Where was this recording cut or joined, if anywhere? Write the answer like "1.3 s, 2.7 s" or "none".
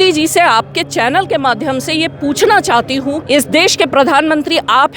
3.2 s